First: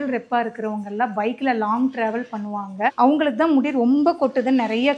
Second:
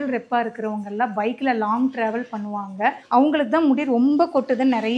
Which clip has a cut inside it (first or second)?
first